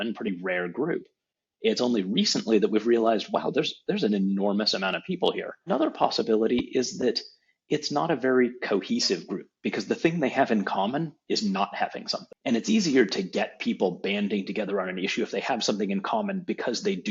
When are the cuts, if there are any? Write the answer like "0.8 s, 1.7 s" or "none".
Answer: none